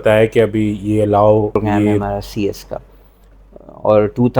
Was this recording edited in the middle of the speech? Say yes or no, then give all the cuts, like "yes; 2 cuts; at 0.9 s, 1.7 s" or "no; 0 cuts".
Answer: yes; 1 cut; at 2.0 s